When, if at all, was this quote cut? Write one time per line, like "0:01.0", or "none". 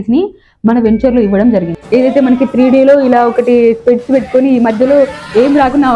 0:01.8